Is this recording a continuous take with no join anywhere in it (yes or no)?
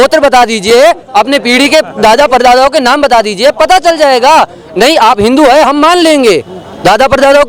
yes